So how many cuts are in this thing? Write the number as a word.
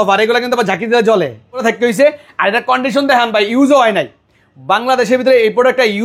one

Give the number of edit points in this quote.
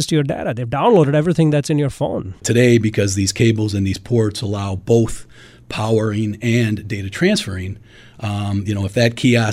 one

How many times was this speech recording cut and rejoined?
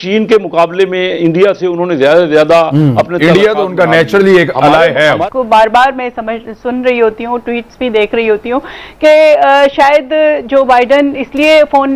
one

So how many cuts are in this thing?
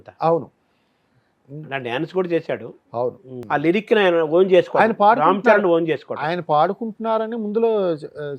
one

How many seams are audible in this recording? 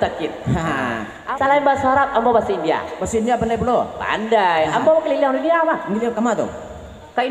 one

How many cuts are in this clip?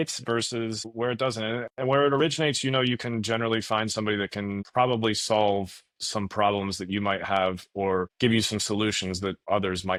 zero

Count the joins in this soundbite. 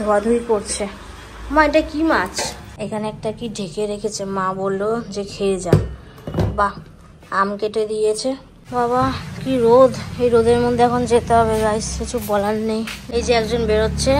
three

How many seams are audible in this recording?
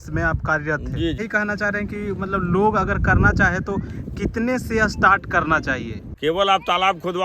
two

